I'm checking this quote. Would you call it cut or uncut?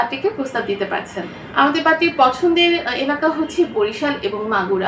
uncut